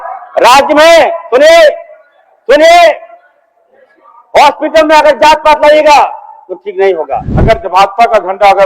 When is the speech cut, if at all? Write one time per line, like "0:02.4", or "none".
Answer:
0:07.3